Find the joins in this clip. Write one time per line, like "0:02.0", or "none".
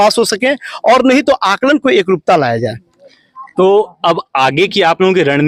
none